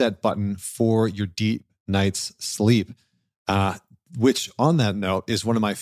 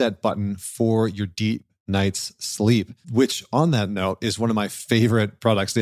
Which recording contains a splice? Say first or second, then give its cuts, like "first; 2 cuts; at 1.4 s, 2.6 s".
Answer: second; 1 cut; at 3.0 s